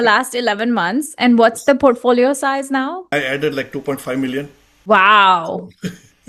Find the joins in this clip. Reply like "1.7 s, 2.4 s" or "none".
3.1 s, 4.9 s

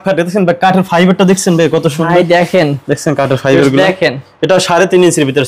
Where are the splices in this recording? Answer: none

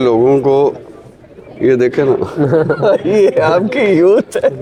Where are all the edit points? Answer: none

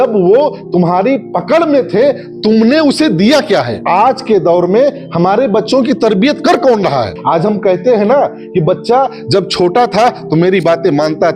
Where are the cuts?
3.8 s, 7.1 s

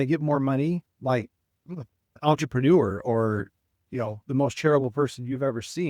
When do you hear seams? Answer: 2.0 s

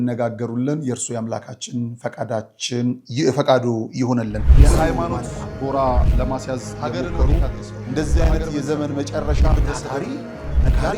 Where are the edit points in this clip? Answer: 4.4 s

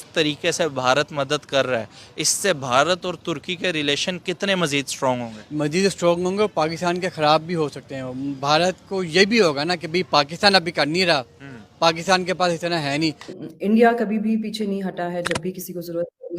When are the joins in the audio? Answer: 13.3 s

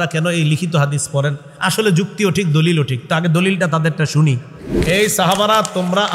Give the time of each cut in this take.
4.8 s

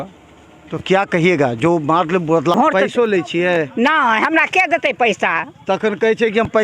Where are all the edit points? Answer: 2.5 s

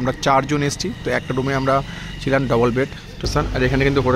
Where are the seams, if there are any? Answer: 3.3 s

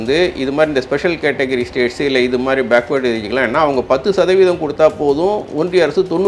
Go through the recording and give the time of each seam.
none

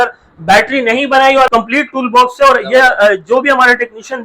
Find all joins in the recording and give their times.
1.5 s

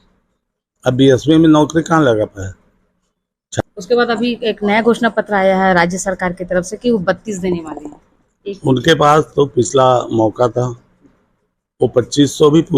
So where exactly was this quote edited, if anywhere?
3.6 s

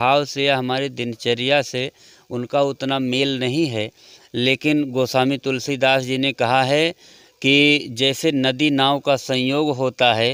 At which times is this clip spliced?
none

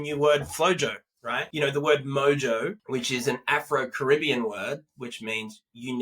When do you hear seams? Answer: 1.4 s, 2.8 s

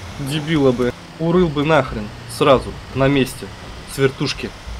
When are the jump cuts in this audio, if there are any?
1.1 s

